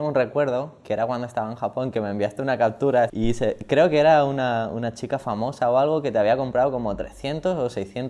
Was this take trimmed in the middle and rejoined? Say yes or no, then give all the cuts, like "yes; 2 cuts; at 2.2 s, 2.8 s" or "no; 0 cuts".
yes; 1 cut; at 3.1 s